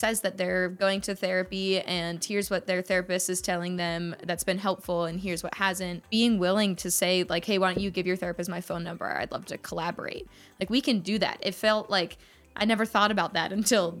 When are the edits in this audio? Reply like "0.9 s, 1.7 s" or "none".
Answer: 6.0 s